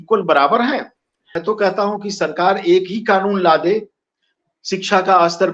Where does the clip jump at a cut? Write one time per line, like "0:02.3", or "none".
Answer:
0:01.3